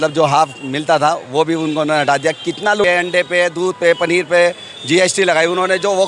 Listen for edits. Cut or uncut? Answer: cut